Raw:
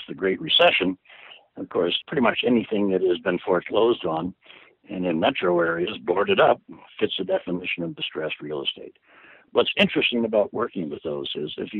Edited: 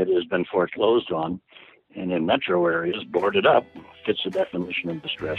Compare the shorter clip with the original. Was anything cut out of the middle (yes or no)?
no